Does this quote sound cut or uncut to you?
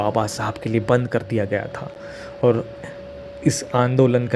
uncut